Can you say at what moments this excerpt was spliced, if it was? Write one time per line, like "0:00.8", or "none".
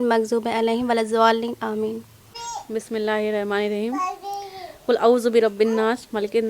0:02.4